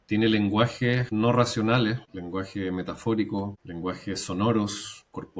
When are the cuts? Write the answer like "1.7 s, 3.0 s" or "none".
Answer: 1.1 s, 2.1 s, 3.6 s